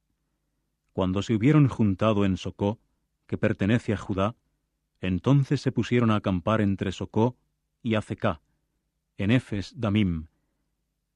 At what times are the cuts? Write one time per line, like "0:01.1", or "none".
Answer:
none